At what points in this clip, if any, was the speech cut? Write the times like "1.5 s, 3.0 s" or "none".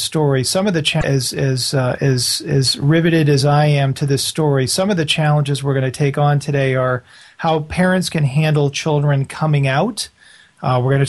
5.2 s